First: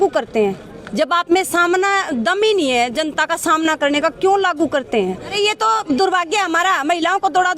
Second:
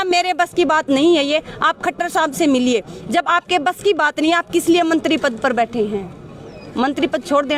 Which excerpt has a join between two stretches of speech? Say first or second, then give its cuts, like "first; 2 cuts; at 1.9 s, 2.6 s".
first; 1 cut; at 5.3 s